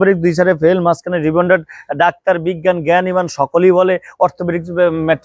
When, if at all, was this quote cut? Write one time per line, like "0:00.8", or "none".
none